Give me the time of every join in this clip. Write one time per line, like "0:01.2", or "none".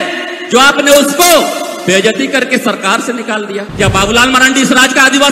0:03.7